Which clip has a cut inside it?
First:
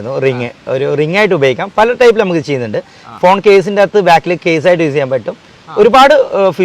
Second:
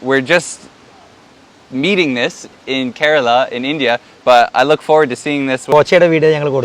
second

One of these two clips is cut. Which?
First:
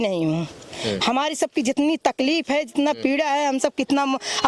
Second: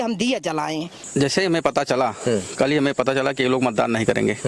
second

